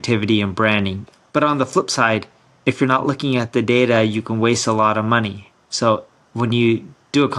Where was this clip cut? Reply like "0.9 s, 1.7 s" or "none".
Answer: 1.0 s